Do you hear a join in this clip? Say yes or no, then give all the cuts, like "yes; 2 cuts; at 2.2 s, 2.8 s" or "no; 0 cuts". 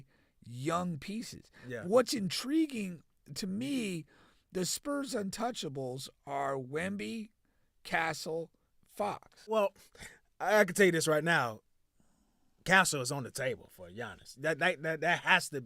yes; 1 cut; at 9.5 s